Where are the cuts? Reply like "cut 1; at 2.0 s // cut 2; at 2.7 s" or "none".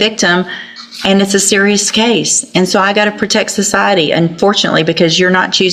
none